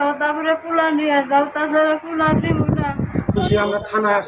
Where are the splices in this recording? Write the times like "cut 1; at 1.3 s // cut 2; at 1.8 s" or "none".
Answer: cut 1; at 3.4 s